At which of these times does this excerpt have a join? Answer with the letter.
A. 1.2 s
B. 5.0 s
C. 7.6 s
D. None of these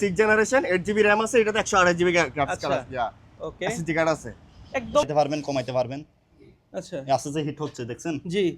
B